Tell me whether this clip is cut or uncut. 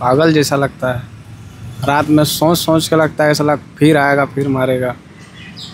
uncut